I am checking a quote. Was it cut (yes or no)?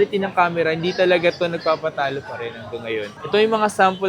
no